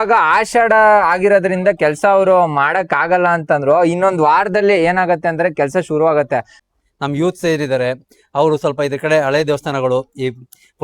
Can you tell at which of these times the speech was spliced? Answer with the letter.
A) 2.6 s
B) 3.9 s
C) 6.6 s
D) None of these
C